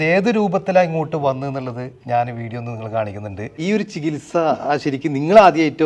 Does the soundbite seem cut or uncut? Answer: cut